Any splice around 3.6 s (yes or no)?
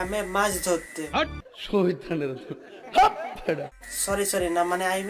no